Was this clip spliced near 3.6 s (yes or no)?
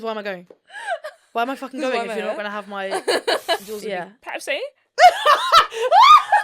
yes